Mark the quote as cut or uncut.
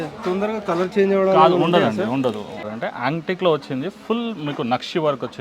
cut